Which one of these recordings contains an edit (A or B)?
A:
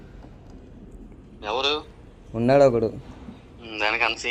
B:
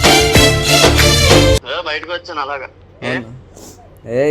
B